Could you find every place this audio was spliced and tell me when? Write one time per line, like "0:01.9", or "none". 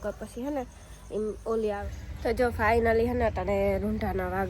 0:01.9